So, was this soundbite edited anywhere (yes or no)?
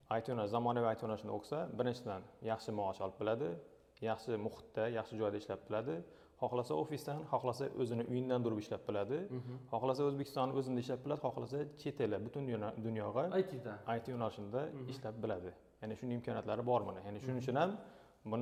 no